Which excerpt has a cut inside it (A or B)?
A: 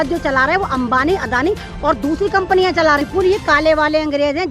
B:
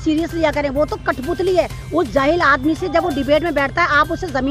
A